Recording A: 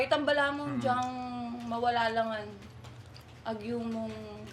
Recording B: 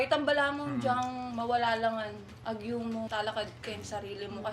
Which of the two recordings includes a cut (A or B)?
B